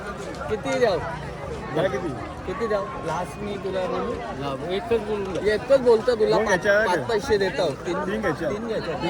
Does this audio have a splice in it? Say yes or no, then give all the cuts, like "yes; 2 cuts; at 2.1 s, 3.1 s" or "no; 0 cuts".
no; 0 cuts